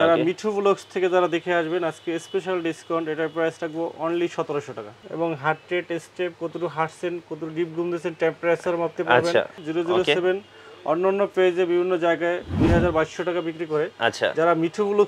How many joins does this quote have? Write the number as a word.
two